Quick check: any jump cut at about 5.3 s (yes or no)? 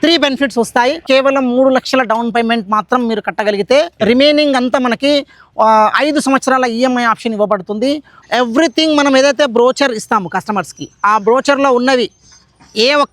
no